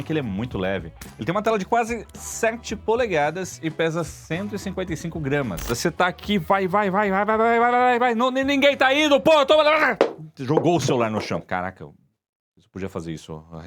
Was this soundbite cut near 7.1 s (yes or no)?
no